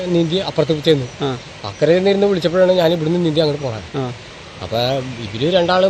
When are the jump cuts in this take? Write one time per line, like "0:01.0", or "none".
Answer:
0:03.1

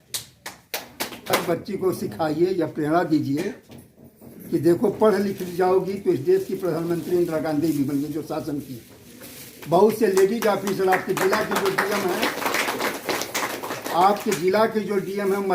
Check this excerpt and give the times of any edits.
0:01.3

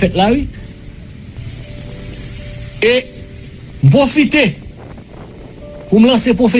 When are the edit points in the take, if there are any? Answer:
0:01.5

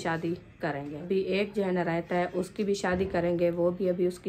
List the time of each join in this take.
0:00.9

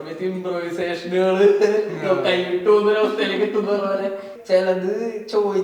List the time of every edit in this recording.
0:04.3

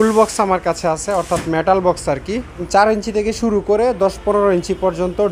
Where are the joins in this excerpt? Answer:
0:02.7

